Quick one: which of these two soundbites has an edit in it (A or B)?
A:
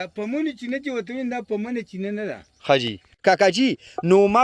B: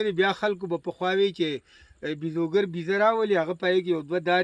A